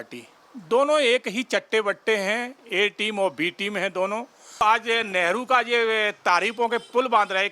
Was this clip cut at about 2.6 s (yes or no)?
no